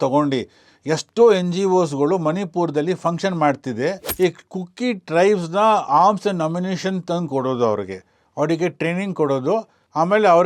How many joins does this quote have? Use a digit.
1